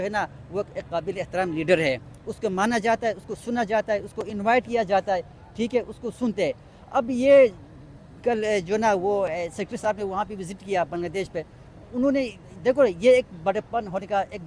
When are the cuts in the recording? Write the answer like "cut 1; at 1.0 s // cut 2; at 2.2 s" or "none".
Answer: none